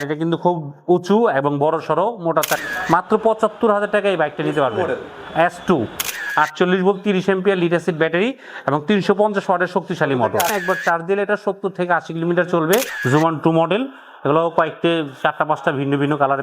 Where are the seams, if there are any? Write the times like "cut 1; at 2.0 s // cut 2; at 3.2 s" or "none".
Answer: cut 1; at 2.5 s // cut 2; at 6.2 s // cut 3; at 10.5 s // cut 4; at 13.0 s